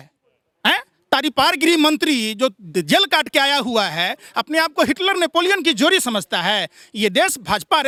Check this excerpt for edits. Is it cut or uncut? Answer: uncut